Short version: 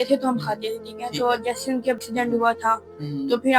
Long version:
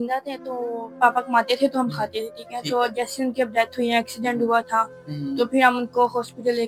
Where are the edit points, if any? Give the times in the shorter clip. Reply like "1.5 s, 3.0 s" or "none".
2.0 s